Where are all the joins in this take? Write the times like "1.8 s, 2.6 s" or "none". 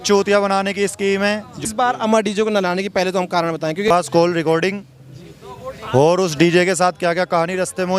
1.6 s, 3.9 s